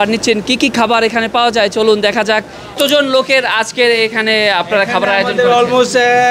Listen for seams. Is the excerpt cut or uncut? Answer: cut